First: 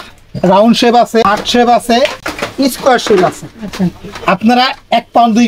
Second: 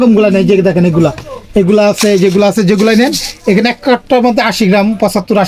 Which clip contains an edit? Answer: first; 1 cut; at 1.2 s

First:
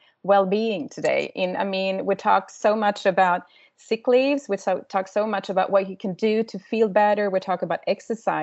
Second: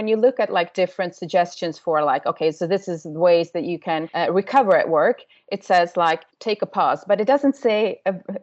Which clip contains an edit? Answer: second; 2 cuts; at 4.1 s, 6.3 s

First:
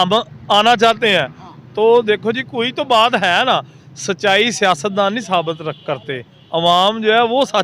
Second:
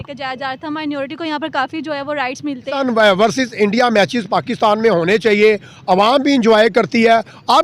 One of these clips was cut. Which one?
second; 1 cut; at 2.7 s

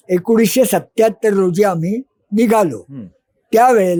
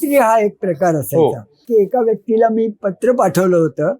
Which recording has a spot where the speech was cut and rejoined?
second; 1 cut; at 1.7 s

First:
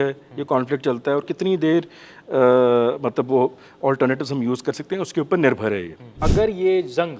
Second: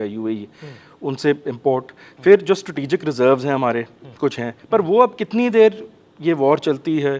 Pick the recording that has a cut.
first; 1 cut; at 6.2 s

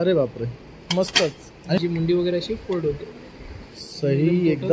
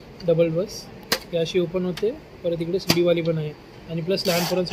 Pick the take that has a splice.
first; 1 cut; at 1.8 s

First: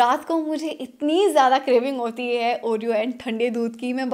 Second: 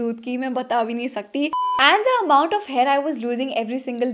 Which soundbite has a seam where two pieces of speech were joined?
second; 1 cut; at 1.5 s

